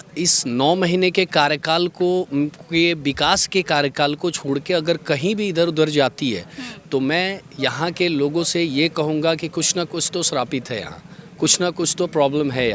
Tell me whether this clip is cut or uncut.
uncut